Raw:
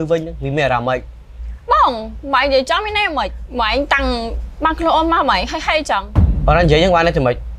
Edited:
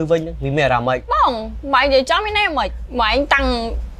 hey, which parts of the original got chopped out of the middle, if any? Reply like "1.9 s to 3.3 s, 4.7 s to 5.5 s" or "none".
1.1 s to 1.7 s